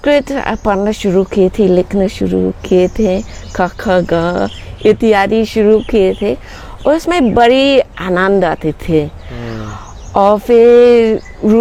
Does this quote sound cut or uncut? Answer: uncut